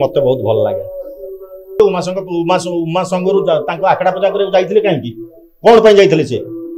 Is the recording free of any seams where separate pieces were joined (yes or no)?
no